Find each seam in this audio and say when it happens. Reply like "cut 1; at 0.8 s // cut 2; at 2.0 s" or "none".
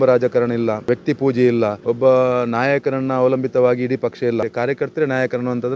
cut 1; at 0.9 s // cut 2; at 1.8 s // cut 3; at 4.5 s